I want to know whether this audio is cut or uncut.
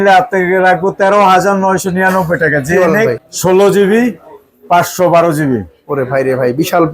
cut